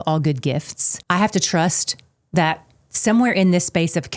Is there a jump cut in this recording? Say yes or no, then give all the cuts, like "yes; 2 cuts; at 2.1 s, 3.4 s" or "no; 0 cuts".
yes; 1 cut; at 0.9 s